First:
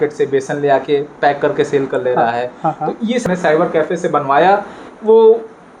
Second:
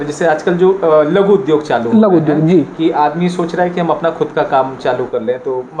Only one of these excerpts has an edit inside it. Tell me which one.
first; 1 cut; at 3.2 s

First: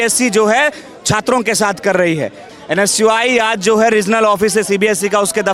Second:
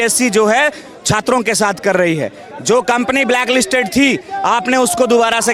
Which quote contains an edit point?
first; 1 cut; at 2.5 s

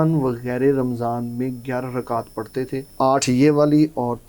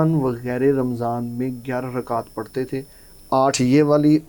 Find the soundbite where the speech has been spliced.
first; 1 cut; at 2.9 s

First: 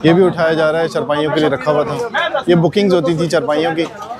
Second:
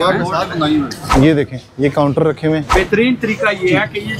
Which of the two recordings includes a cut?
second; 2 cuts; at 1.1 s, 2.7 s

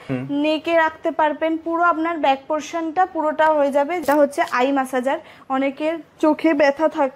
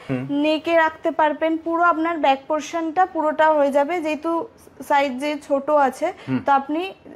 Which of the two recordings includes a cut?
first; 1 cut; at 4.0 s

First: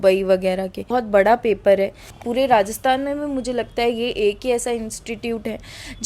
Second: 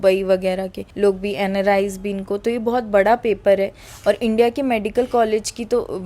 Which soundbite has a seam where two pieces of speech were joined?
first; 2 cuts; at 0.9 s, 2.1 s

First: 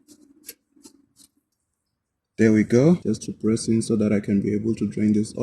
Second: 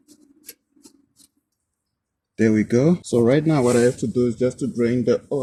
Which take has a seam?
first; 1 cut; at 3.0 s

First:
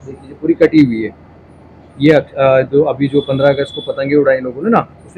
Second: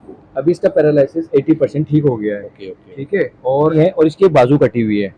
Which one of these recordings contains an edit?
second; 1 cut; at 3.7 s

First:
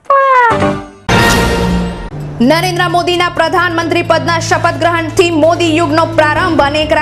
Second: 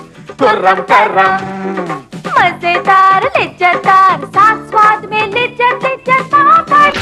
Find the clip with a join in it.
first; 1 cut; at 0.9 s

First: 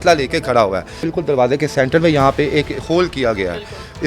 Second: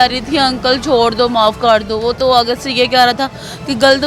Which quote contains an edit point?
first; 1 cut; at 1.0 s

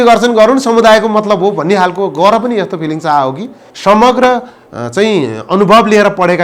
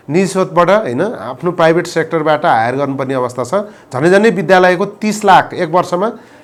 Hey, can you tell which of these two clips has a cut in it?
first; 1 cut; at 3.7 s

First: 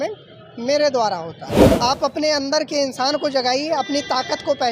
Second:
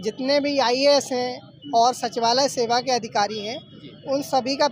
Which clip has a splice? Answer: first; 1 cut; at 1.6 s

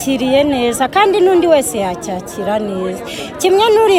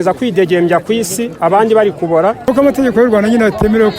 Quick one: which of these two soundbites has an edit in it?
second; 1 cut; at 2.5 s

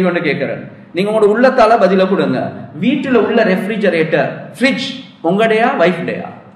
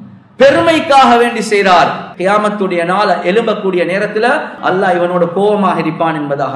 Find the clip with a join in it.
second; 2 cuts; at 2.0 s, 4.5 s

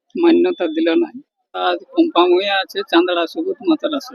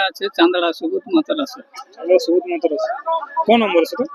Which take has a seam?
first; 1 cut; at 1.6 s

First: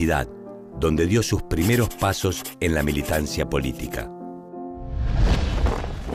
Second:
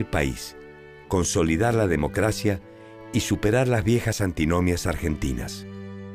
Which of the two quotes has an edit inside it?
first; 1 cut; at 2.2 s

